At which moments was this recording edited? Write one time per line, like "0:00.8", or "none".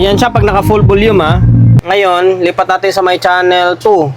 0:01.8